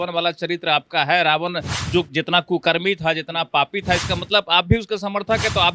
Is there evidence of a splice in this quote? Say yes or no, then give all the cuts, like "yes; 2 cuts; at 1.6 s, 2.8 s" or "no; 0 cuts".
no; 0 cuts